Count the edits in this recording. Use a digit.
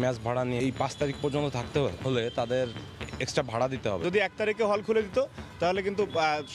1